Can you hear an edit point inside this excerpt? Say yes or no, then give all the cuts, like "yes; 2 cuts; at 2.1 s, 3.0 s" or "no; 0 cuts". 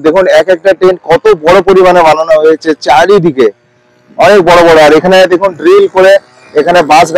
no; 0 cuts